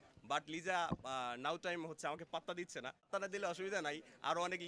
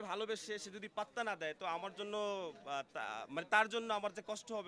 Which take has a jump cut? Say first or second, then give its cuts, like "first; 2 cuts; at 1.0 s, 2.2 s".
first; 1 cut; at 3.1 s